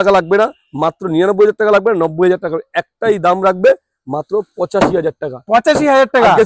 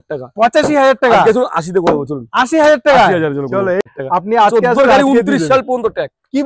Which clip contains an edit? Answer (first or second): second